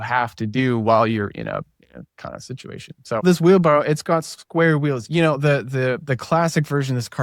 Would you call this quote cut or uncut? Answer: cut